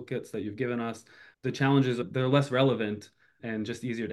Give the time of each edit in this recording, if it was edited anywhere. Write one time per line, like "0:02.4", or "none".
0:02.0
0:03.4